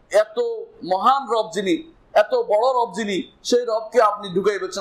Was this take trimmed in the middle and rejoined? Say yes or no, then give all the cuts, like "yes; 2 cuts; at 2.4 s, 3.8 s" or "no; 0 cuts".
no; 0 cuts